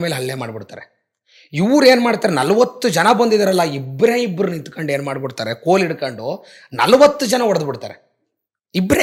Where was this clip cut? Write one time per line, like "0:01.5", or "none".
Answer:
none